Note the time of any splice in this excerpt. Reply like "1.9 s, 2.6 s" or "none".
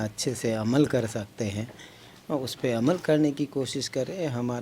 none